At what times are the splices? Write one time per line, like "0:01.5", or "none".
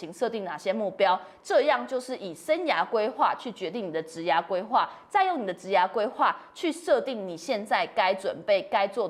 none